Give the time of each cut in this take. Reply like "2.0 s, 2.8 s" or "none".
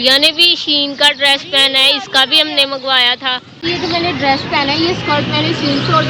3.5 s

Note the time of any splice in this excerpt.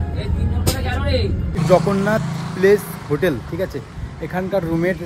1.6 s

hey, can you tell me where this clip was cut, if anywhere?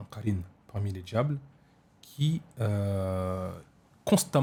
none

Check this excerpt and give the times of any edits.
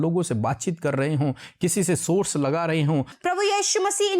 3.1 s

